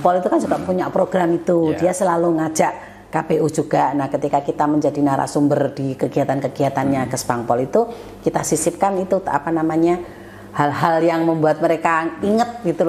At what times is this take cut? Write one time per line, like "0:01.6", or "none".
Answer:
none